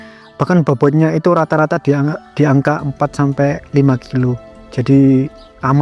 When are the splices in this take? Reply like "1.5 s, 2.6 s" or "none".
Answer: none